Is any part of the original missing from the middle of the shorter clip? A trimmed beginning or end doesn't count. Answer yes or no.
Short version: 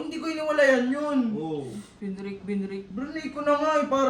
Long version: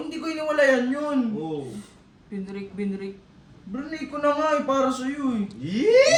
yes